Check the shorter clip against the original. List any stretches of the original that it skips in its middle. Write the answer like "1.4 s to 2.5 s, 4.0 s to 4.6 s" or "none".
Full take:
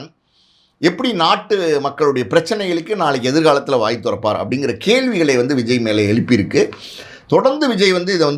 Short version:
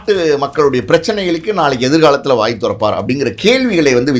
none